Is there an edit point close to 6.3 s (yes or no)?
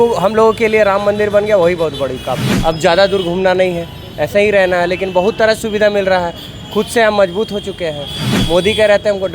no